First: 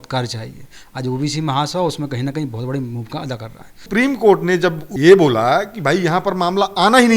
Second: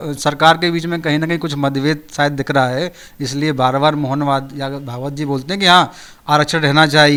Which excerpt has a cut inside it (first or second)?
first